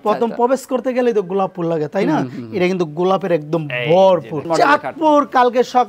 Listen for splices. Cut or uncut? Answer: cut